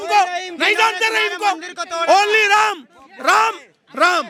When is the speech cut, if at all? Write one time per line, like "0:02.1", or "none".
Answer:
none